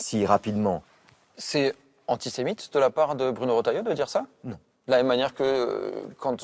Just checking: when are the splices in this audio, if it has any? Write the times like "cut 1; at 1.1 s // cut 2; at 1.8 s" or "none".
cut 1; at 2.4 s